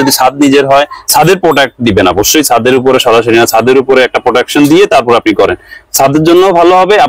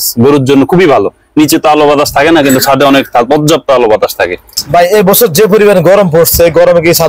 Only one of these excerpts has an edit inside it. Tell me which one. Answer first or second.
second